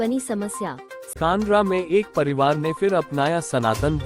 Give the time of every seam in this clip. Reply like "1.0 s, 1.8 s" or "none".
1.1 s